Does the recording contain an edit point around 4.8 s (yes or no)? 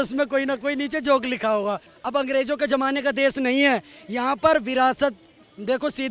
no